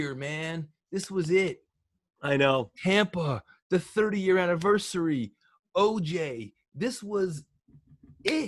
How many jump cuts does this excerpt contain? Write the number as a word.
zero